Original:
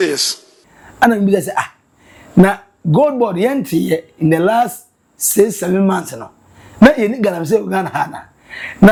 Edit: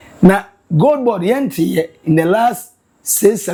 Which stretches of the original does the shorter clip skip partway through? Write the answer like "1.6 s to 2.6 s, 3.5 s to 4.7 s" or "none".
none